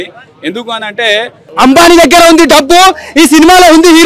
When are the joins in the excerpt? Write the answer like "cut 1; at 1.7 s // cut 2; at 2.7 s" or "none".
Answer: cut 1; at 1.4 s